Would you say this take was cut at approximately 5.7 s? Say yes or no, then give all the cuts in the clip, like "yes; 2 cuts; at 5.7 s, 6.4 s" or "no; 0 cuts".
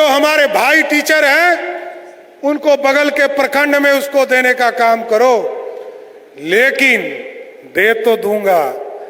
no; 0 cuts